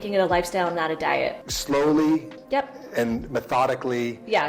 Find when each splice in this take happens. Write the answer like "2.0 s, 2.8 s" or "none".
1.5 s